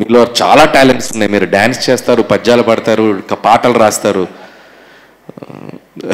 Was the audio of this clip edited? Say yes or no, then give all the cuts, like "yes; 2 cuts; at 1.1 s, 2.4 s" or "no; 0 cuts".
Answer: no; 0 cuts